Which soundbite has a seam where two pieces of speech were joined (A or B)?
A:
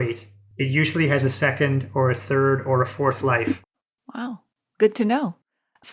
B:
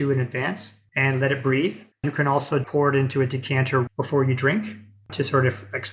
B